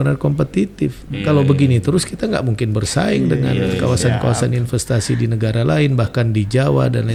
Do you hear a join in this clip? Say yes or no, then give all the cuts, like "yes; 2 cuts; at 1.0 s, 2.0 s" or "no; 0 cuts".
no; 0 cuts